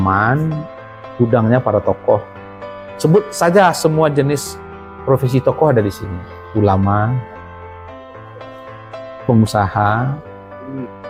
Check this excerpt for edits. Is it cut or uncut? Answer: uncut